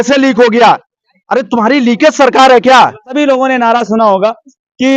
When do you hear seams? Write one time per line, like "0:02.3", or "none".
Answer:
0:03.1